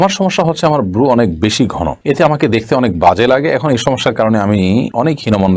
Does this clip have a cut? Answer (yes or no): no